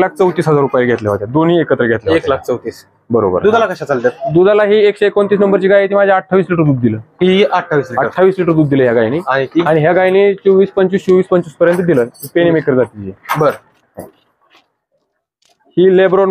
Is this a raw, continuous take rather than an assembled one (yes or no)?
yes